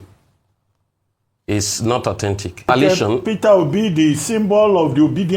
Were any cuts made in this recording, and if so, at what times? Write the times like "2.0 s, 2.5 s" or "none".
2.7 s